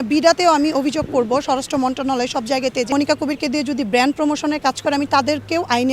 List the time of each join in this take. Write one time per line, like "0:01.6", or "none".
0:02.9

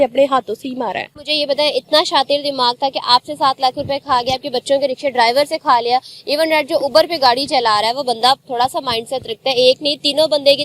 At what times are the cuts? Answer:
0:01.2

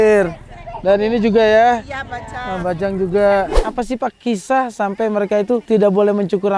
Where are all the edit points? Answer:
0:03.6
0:05.6

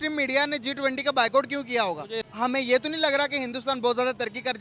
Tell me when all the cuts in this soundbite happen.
none

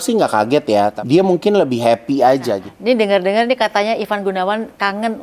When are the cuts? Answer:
0:01.0
0:02.7

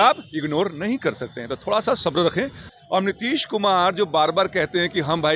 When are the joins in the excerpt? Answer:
0:02.6

